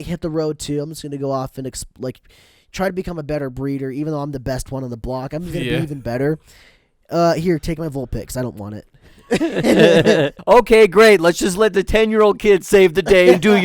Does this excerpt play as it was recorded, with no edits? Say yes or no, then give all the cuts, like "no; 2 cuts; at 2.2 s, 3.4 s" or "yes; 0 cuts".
no; 1 cut; at 10.4 s